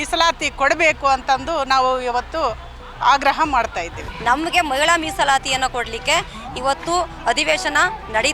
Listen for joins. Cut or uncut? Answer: cut